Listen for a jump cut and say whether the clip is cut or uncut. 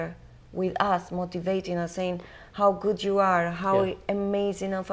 uncut